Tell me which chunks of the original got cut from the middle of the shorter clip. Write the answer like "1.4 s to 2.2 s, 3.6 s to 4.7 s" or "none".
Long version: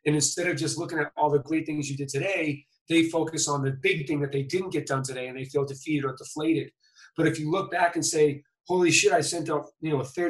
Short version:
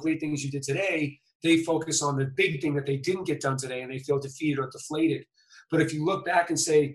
none